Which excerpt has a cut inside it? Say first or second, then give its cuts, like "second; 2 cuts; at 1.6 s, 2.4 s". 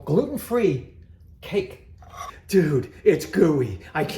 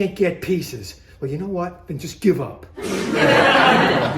first; 1 cut; at 2.2 s